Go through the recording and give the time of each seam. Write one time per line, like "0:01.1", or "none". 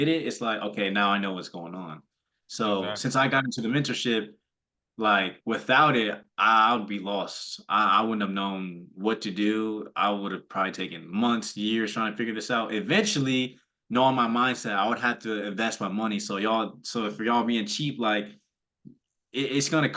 none